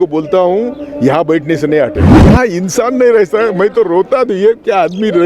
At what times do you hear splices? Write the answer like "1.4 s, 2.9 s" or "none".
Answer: 2.1 s